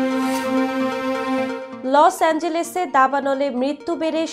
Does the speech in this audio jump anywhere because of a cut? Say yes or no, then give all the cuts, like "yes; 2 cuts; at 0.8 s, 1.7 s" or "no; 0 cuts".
no; 0 cuts